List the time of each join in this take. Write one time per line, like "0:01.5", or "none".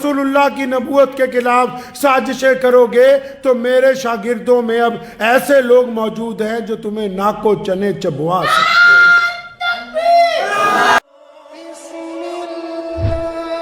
0:11.0